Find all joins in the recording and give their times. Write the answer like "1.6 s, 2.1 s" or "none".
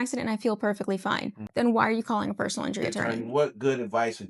1.4 s, 3.1 s